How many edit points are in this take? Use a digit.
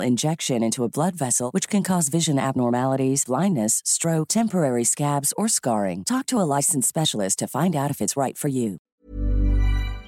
1